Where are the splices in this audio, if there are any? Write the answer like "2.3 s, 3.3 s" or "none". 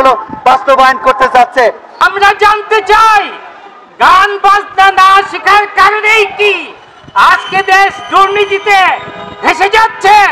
2.0 s